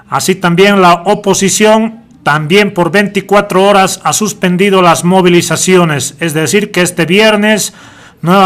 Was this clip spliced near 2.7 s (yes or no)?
no